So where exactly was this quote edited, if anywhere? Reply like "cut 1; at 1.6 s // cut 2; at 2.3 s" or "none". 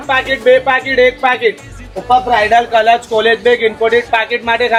none

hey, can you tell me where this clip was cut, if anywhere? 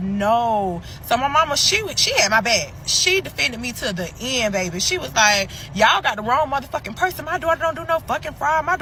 none

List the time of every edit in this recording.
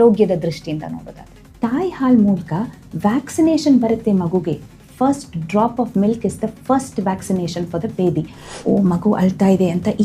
cut 1; at 1.4 s // cut 2; at 8.5 s

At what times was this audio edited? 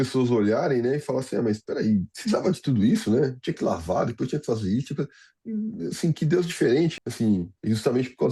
cut 1; at 2.1 s // cut 2; at 5.2 s // cut 3; at 7.0 s

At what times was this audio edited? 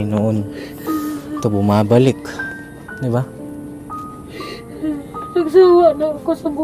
none

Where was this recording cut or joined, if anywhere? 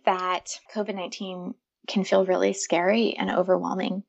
none

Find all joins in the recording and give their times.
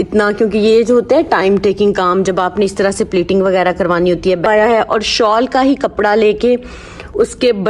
cut 1; at 4.5 s

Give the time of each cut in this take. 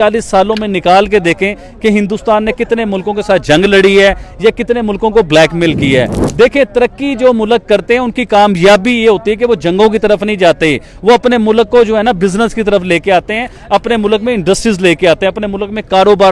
none

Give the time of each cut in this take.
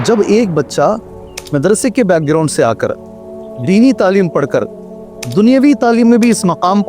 cut 1; at 1.4 s

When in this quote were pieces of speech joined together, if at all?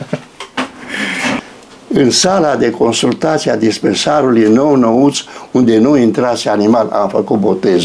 cut 1; at 1.4 s

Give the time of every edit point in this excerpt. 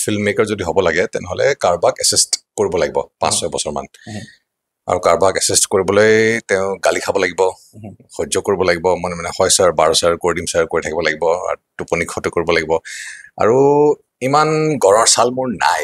none

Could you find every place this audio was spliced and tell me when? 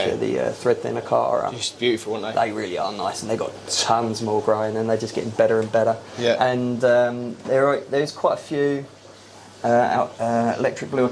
none

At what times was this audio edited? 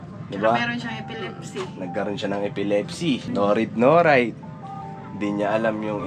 cut 1; at 3.3 s

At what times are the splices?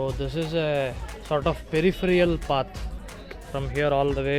cut 1; at 1.1 s

